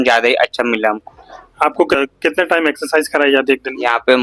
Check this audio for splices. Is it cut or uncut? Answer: cut